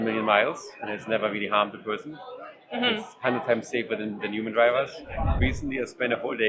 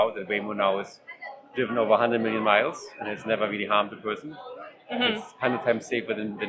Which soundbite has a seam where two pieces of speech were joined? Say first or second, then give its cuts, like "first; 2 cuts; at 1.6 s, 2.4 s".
first; 1 cut; at 5.5 s